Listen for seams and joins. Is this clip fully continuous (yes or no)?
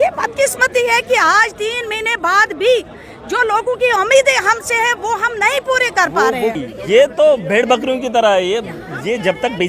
no